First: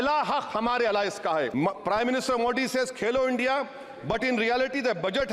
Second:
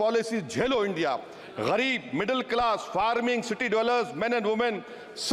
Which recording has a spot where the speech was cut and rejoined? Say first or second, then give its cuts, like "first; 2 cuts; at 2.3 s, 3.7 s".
first; 1 cut; at 1.5 s